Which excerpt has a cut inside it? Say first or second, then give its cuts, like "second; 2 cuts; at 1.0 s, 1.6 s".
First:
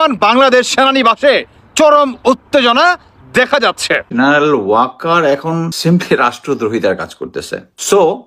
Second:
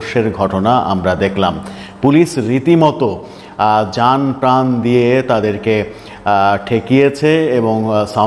first; 1 cut; at 4.0 s